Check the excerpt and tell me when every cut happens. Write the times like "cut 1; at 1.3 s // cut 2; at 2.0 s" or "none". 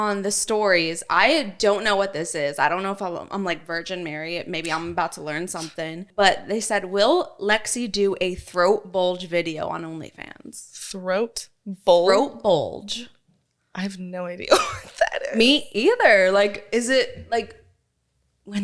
cut 1; at 6.0 s